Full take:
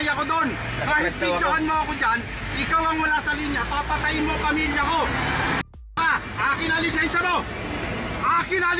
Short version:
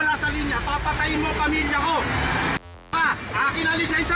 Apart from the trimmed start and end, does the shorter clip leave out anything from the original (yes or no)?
no